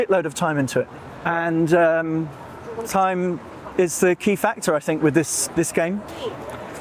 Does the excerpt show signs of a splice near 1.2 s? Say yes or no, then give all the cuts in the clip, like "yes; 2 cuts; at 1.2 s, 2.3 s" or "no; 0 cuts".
yes; 1 cut; at 1.2 s